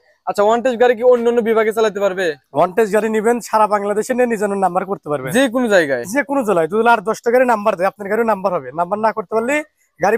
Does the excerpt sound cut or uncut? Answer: uncut